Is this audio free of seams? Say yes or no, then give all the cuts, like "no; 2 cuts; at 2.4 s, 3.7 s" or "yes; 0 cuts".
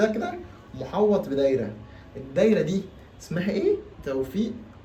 yes; 0 cuts